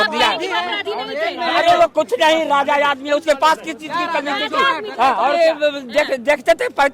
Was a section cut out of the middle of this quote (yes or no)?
yes